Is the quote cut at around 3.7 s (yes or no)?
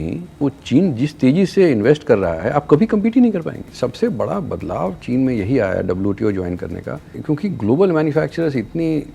yes